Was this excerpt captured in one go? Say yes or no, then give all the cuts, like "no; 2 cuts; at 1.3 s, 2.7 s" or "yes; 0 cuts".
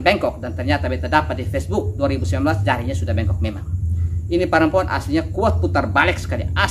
yes; 0 cuts